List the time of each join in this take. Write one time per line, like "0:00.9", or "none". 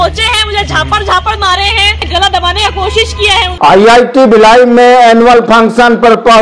0:02.0
0:03.5